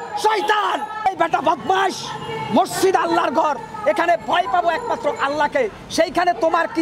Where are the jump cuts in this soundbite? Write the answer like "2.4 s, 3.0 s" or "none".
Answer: 1.1 s

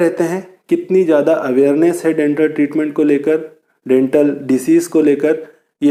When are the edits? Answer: none

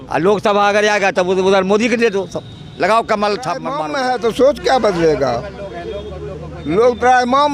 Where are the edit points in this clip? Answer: 3.8 s

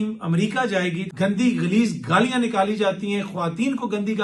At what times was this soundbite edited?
1.0 s

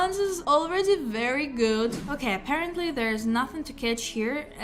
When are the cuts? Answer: 2.0 s

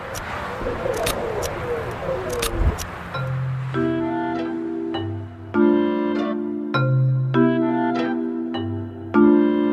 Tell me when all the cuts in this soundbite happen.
7.1 s

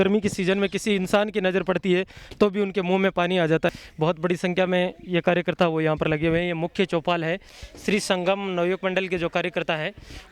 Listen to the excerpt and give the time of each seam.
3.7 s, 7.8 s

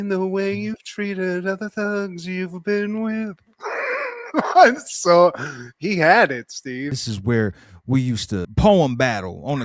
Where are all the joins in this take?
7.0 s

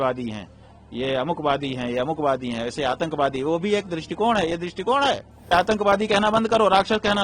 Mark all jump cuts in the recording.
5.5 s

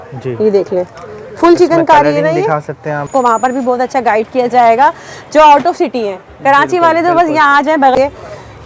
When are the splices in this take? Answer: 3.1 s, 7.9 s

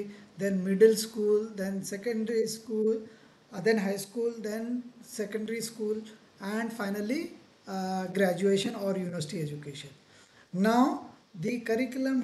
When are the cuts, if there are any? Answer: none

